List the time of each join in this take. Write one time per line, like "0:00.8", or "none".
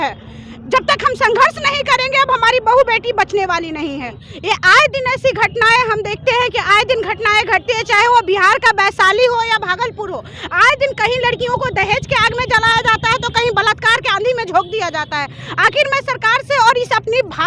0:04.0